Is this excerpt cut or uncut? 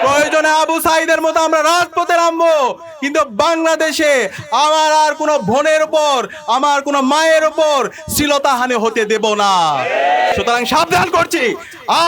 cut